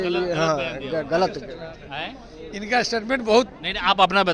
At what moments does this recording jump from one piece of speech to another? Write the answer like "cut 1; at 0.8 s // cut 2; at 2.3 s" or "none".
none